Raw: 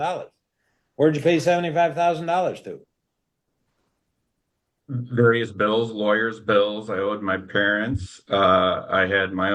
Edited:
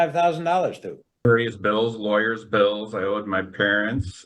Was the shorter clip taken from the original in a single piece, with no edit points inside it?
no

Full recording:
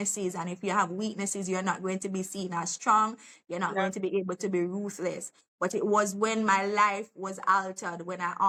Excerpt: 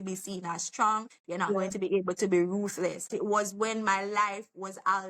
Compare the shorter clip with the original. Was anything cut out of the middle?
yes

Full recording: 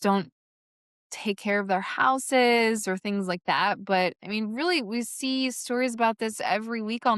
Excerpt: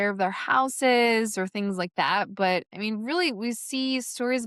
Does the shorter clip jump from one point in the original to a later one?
no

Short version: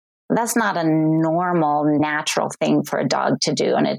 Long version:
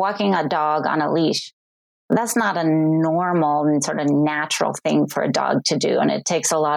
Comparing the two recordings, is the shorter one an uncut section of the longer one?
no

